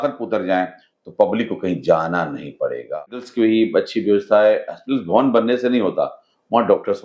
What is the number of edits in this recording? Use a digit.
1